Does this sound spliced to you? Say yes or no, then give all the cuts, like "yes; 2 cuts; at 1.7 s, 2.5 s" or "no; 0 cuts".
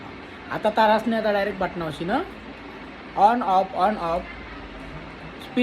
no; 0 cuts